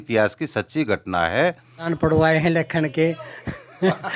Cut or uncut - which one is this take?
cut